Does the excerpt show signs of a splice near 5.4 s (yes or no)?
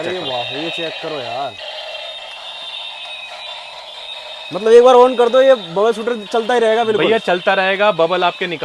no